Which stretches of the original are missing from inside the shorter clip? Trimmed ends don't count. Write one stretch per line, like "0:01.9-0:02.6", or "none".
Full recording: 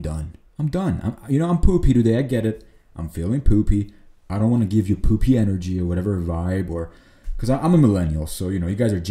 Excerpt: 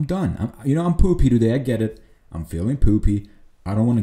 none